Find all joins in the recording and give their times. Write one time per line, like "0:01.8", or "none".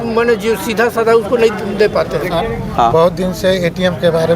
0:02.4